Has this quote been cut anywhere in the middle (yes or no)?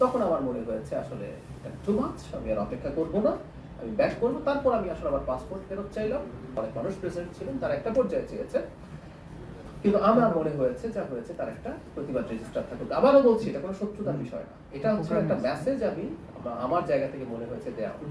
yes